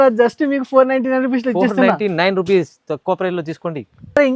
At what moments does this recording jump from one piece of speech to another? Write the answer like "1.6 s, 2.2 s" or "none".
none